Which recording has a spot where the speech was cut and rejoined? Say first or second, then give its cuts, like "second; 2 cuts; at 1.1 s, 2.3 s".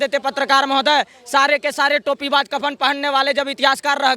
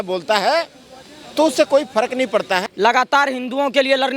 second; 1 cut; at 2.7 s